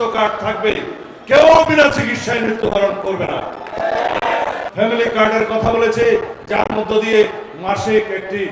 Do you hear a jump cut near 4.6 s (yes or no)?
yes